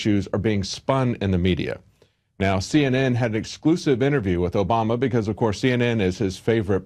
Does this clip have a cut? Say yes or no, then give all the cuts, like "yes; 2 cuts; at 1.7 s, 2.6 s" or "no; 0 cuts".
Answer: yes; 1 cut; at 1.5 s